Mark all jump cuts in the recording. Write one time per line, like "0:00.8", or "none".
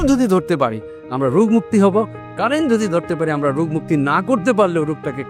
none

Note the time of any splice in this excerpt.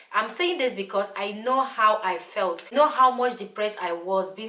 0:02.7

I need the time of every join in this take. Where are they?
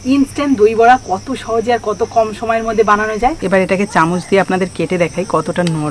0:03.4

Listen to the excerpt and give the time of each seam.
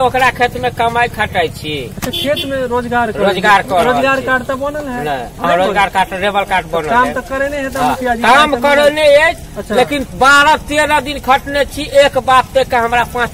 none

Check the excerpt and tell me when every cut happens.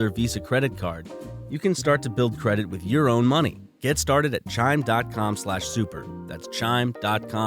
0:03.7

